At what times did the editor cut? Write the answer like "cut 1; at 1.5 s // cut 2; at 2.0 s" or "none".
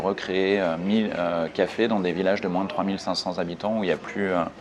none